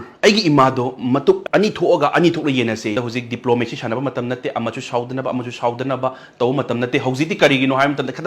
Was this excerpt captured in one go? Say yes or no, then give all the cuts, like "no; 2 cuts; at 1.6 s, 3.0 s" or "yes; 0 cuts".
no; 1 cut; at 2.9 s